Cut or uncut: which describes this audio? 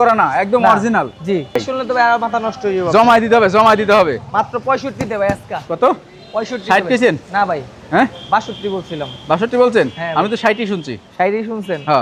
uncut